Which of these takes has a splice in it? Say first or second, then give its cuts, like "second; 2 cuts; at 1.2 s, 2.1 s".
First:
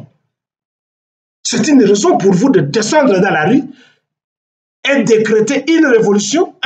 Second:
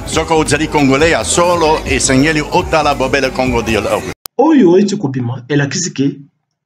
second; 1 cut; at 4.2 s